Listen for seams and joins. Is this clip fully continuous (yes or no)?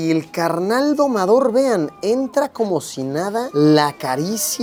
yes